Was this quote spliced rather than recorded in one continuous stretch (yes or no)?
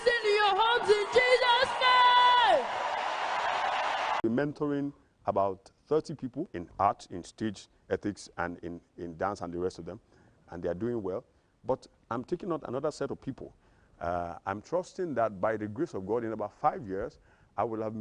yes